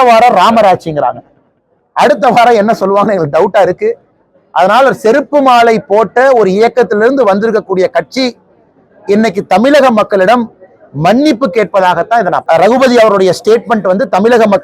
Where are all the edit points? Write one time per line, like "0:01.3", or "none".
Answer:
0:12.4